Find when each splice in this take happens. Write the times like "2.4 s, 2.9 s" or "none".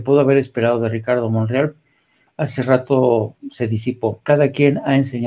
4.2 s